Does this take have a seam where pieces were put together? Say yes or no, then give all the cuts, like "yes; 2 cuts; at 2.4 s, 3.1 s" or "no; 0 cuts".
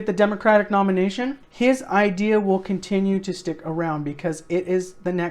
yes; 1 cut; at 1.4 s